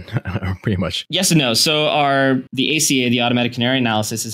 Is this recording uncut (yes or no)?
no